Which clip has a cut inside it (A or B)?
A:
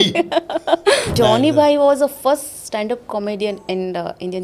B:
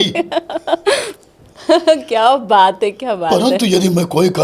A